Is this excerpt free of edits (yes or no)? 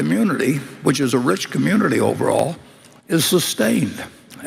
yes